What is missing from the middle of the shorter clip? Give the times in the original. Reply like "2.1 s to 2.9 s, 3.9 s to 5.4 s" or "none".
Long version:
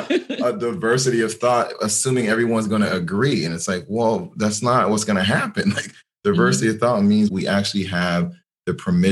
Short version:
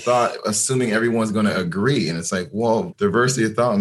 4.3 s to 6.2 s